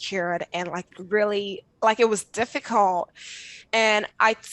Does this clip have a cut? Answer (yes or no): yes